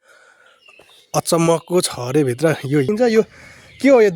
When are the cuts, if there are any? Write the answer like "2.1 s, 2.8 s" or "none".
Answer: 2.9 s

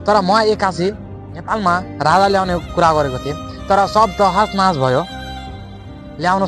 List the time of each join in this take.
none

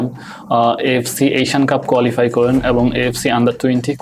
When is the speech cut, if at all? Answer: none

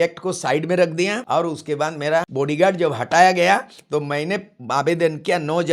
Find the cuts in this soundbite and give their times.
1.2 s, 2.3 s

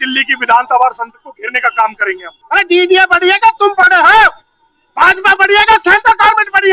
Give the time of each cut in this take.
2.3 s

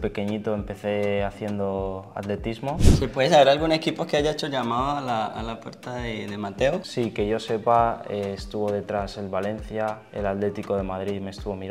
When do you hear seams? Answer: 2.9 s, 6.9 s, 10.1 s

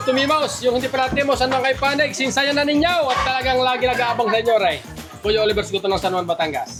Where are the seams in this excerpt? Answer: none

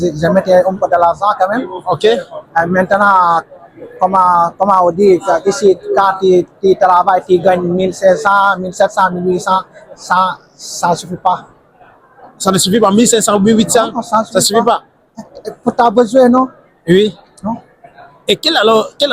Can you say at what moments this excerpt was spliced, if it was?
none

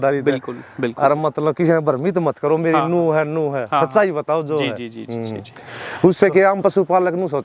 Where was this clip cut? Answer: none

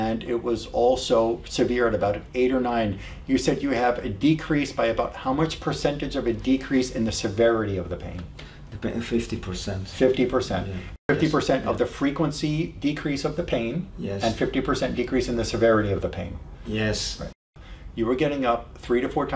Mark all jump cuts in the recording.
10.9 s, 17.4 s

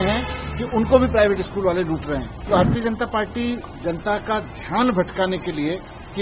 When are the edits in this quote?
2.4 s

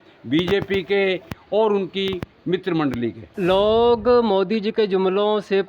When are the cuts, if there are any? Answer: 3.2 s

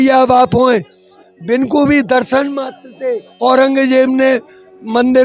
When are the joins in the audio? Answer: 3.3 s

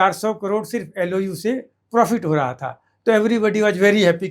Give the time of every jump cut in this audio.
none

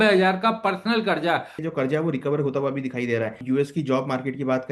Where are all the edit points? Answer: 1.6 s, 3.4 s

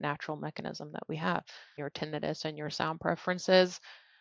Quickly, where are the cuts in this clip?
1.8 s

